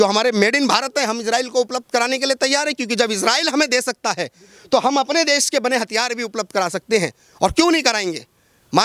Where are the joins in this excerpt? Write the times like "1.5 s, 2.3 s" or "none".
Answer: none